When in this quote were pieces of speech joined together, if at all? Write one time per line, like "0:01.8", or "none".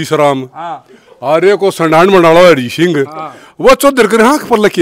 none